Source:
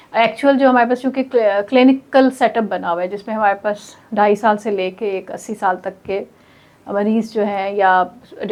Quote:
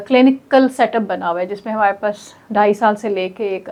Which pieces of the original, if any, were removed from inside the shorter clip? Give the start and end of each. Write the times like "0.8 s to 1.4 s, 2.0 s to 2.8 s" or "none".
none